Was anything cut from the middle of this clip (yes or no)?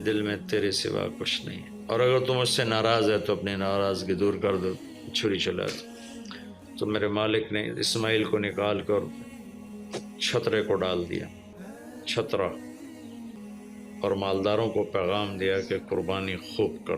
yes